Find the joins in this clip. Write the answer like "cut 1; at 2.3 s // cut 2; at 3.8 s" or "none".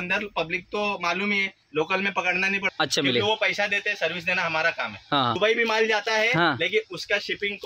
cut 1; at 2.7 s // cut 2; at 5.4 s